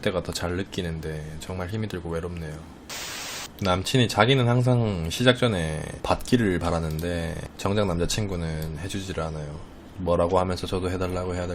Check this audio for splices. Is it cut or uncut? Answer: cut